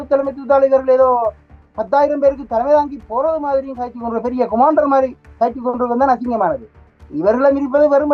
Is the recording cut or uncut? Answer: uncut